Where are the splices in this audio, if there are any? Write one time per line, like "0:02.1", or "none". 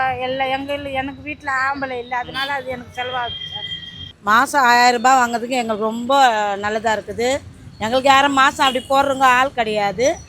none